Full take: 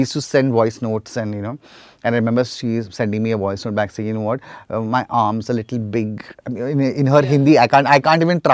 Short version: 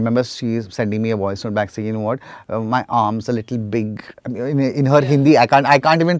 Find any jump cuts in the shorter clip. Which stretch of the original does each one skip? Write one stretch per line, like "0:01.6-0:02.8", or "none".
none